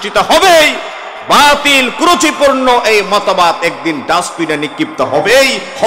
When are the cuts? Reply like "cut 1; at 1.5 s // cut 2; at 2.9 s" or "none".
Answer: none